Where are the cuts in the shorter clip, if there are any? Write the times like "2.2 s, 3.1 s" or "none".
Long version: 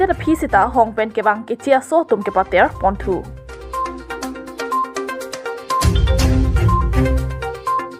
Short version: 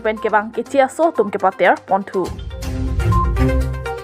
2.7 s